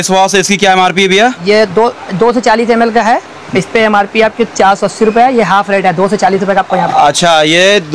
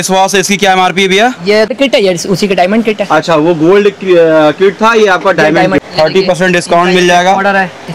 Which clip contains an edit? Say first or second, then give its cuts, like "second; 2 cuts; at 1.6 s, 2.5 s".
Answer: second; 2 cuts; at 1.7 s, 5.8 s